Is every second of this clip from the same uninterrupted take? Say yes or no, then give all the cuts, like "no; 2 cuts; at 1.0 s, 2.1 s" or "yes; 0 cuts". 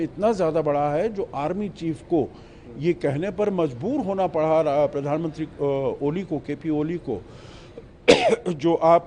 yes; 0 cuts